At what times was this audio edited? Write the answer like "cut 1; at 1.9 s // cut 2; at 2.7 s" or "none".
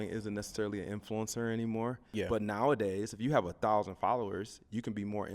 cut 1; at 2.0 s